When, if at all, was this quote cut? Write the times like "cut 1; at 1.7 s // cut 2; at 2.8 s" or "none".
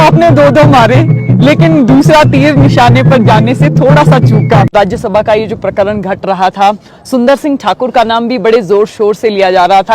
cut 1; at 4.7 s